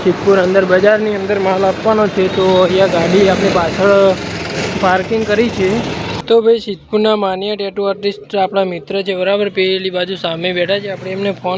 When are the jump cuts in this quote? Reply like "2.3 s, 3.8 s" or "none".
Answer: 4.7 s, 6.1 s